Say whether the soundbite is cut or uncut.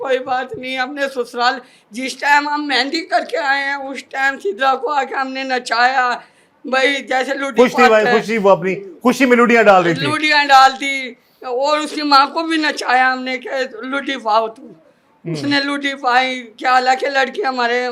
uncut